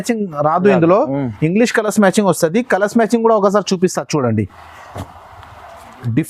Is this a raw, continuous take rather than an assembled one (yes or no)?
yes